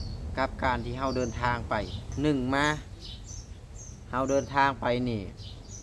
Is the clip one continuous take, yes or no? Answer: no